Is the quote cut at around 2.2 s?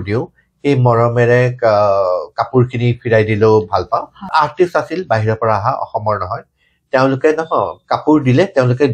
no; 1 cut; at 4.2 s

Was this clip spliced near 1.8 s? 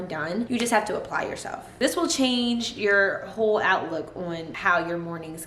yes; 2 cuts; at 1.8 s, 4.5 s

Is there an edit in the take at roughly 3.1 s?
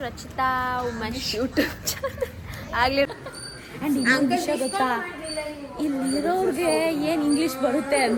yes; 1 cut; at 3.1 s

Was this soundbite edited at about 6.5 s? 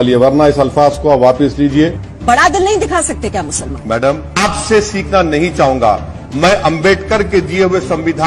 no; 2 cuts; at 2.0 s, 4.3 s

